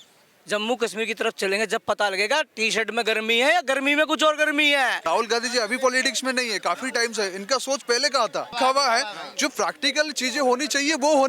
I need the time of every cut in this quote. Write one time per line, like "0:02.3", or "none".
0:05.0
0:08.5